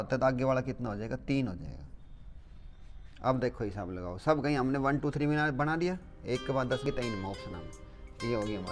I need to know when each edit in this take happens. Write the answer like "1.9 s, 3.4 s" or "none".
6.8 s